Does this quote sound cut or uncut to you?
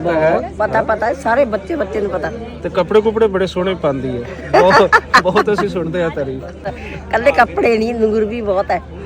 cut